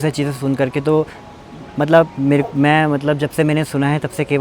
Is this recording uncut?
yes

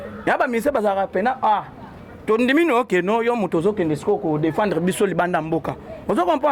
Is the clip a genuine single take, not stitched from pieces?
yes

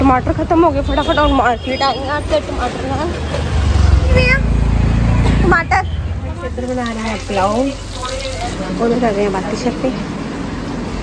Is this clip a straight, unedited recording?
yes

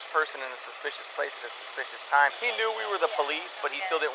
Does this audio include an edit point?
yes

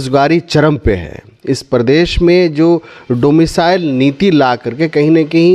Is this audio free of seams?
yes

